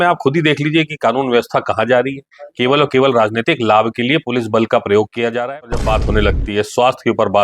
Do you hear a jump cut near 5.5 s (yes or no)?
yes